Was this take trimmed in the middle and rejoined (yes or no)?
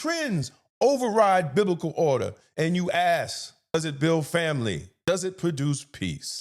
yes